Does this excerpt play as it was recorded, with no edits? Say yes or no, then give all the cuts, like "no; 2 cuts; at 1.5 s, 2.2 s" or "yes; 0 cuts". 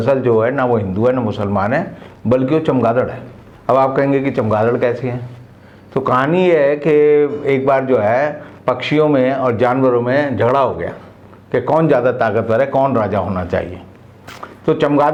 yes; 0 cuts